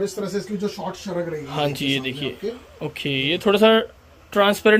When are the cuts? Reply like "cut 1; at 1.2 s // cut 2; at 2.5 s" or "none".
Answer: none